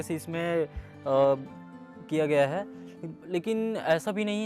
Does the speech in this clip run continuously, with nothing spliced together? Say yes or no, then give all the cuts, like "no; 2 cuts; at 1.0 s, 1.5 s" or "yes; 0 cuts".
yes; 0 cuts